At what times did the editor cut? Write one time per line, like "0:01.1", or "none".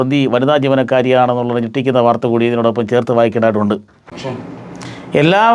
0:04.4

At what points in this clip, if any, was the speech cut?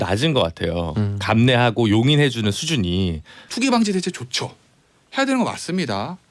0:03.4

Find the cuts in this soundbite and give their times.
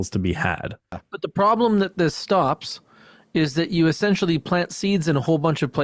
0:01.0

